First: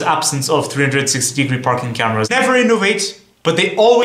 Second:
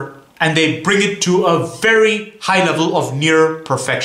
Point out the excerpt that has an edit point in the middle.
first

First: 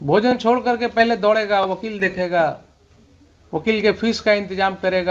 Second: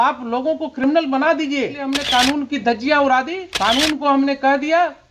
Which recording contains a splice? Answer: second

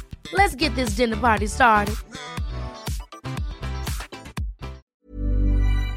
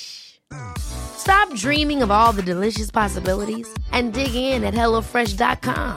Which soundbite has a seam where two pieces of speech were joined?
first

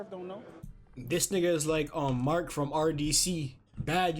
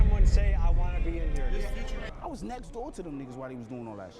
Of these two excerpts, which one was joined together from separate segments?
second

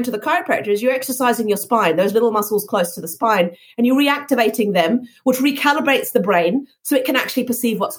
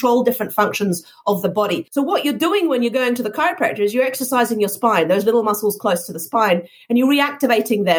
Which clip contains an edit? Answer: second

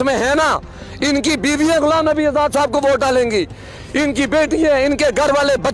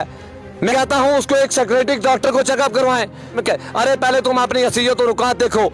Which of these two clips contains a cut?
second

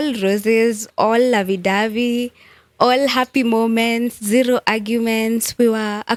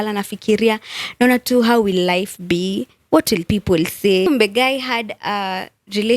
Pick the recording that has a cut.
second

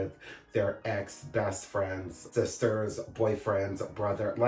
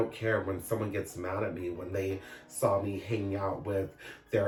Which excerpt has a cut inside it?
first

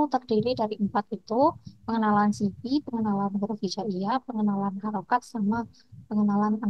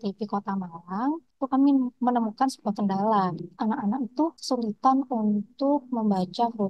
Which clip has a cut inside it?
second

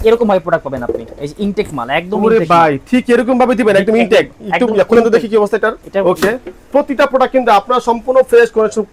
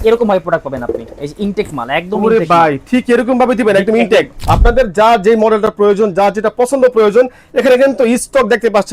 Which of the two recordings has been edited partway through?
second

